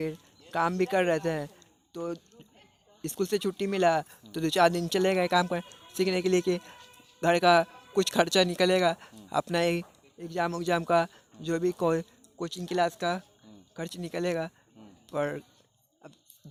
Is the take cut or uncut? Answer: uncut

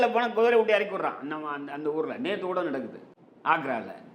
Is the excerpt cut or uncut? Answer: uncut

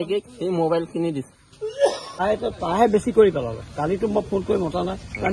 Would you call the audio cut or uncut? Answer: cut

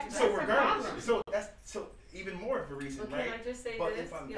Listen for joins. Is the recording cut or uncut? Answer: uncut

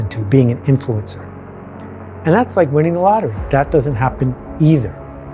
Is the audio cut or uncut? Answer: uncut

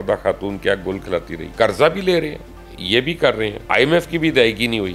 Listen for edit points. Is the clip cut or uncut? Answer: cut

